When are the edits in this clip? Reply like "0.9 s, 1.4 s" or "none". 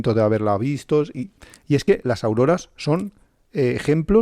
none